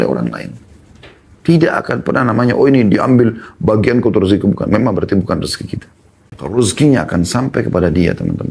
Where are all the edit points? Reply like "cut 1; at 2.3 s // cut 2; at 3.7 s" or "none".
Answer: cut 1; at 6.6 s